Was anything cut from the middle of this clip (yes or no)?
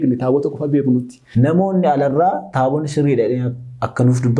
yes